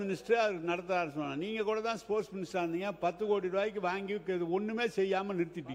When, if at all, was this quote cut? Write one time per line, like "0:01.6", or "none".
none

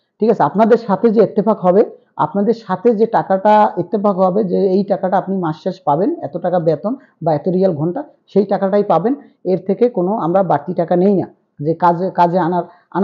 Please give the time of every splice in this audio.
none

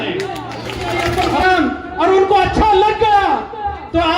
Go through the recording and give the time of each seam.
0:01.0

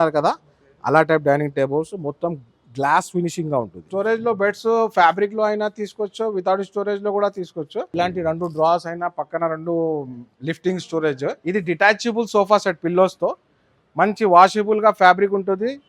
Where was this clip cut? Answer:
0:03.9
0:07.9
0:11.4

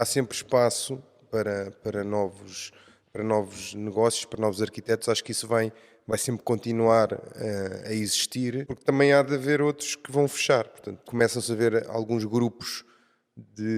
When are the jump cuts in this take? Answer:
0:08.7
0:11.1

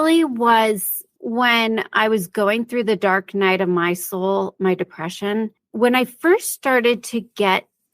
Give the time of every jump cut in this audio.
0:01.1
0:05.6

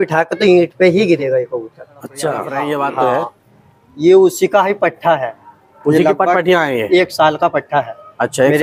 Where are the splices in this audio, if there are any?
0:02.5

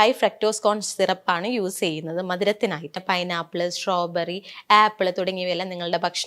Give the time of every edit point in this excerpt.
0:03.0

